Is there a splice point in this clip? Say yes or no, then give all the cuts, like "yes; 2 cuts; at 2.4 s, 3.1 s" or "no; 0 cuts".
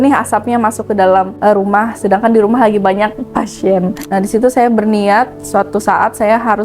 yes; 1 cut; at 4.0 s